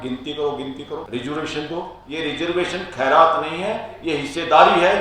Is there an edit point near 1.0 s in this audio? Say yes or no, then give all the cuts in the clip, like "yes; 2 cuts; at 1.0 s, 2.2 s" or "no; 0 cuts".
yes; 2 cuts; at 1.0 s, 2.0 s